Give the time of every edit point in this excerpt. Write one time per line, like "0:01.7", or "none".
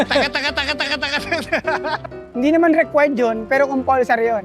0:02.1